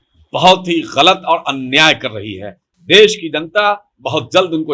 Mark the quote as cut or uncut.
uncut